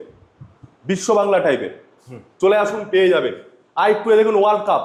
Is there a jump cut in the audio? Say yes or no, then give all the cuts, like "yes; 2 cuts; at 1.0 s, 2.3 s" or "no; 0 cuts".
no; 0 cuts